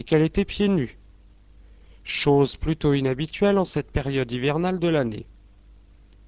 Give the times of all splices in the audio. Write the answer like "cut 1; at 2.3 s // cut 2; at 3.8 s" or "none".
none